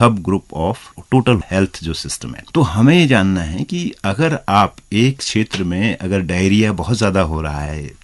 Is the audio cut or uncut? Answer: uncut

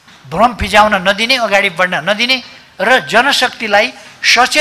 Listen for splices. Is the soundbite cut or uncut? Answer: uncut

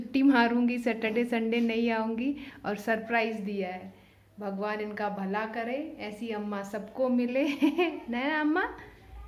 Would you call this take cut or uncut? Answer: uncut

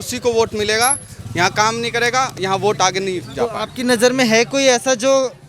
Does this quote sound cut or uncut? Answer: uncut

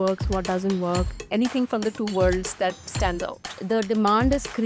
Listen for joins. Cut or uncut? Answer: cut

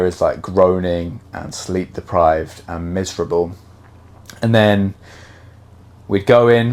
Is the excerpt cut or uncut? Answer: uncut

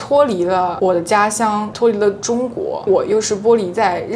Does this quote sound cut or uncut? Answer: cut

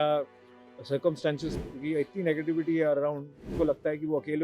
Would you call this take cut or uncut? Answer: cut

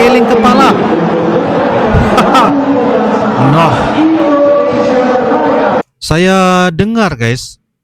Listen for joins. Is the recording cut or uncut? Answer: uncut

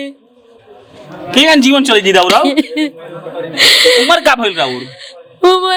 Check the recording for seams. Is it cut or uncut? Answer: uncut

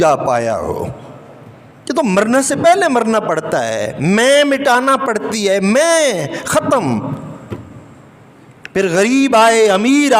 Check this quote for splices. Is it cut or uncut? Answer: uncut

